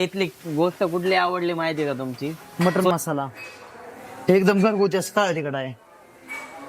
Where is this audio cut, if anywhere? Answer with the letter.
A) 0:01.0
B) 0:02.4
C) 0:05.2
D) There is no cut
B